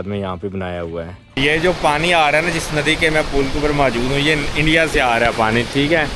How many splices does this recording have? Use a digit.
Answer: 1